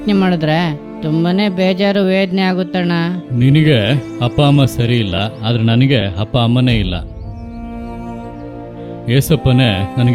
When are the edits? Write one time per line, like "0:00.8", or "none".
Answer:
0:03.2
0:07.1
0:09.0